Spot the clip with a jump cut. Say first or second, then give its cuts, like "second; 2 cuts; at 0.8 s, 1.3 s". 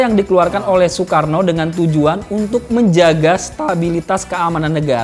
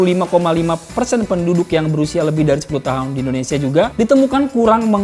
second; 1 cut; at 3.9 s